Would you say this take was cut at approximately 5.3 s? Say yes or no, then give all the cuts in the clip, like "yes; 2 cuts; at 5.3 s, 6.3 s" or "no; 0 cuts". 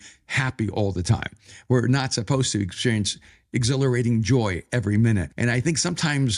yes; 1 cut; at 5.3 s